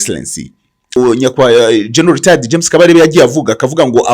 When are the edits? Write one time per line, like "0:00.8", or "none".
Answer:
0:01.0